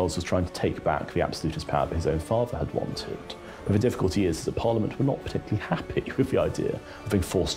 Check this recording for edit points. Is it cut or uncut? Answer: uncut